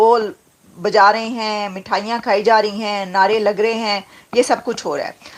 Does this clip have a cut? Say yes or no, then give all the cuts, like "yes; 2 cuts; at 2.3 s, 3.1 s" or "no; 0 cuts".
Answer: no; 0 cuts